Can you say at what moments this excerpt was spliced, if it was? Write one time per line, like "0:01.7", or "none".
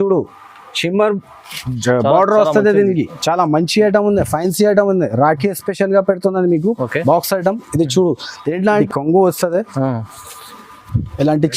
0:08.8